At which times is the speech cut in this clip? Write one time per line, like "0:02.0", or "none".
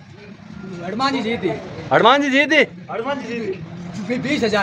none

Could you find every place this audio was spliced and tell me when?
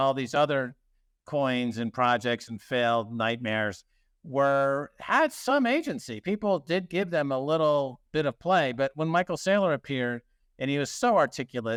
none

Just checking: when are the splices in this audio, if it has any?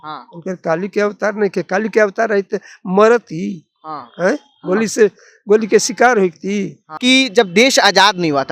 0:06.8

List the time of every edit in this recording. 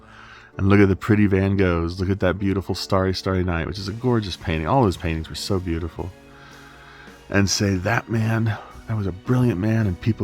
none

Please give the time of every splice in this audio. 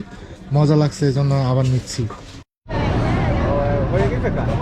0:02.5

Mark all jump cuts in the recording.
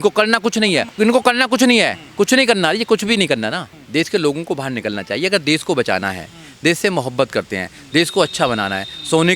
0:00.9
0:03.7

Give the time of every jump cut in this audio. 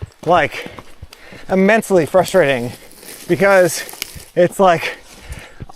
none

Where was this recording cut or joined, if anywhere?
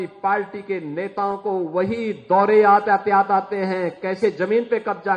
none

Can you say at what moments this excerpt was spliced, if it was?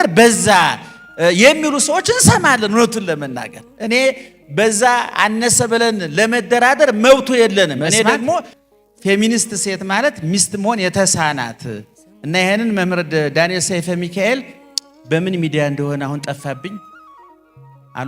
0:08.5

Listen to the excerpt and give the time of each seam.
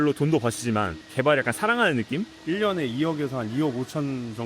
0:02.3

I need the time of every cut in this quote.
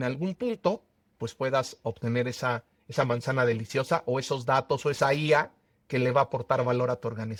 none

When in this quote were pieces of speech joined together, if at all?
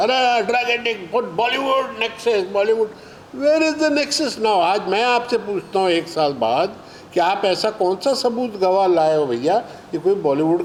none

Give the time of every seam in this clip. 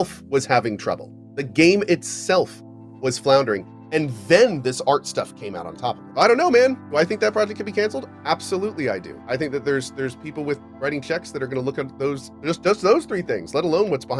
0:06.0
0:09.1

